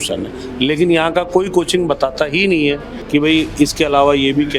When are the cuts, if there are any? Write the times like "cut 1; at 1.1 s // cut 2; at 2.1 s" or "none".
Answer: cut 1; at 2.9 s